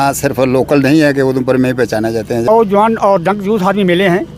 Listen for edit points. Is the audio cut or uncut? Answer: cut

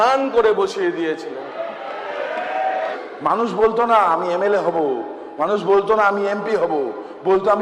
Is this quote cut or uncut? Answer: cut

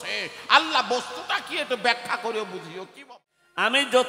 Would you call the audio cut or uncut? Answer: cut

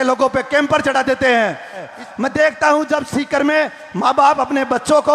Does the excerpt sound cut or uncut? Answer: cut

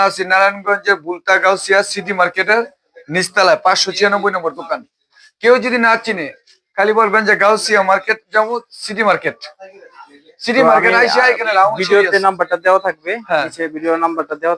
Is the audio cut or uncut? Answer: uncut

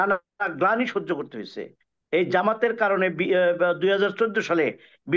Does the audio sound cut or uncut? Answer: uncut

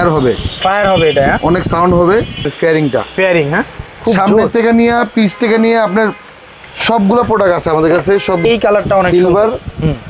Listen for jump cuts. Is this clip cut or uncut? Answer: cut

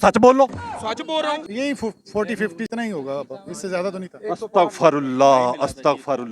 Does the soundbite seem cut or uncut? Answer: cut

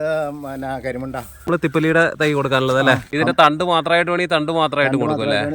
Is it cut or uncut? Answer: cut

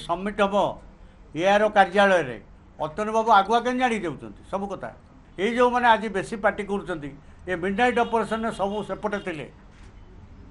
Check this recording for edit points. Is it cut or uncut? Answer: cut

